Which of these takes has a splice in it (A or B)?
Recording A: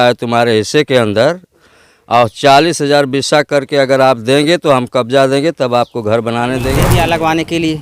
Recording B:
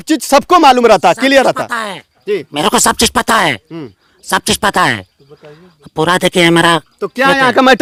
A